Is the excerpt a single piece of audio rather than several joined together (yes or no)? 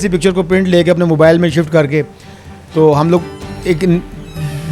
yes